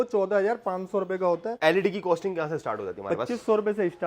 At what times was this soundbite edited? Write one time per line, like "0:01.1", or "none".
0:01.5